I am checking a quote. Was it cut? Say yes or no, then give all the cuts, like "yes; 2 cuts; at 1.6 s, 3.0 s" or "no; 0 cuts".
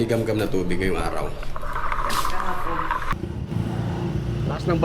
yes; 1 cut; at 3.1 s